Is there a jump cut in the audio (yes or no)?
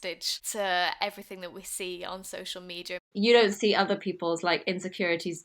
yes